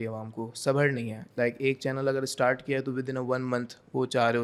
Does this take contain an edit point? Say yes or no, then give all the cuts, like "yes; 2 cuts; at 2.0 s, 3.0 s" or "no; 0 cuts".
no; 0 cuts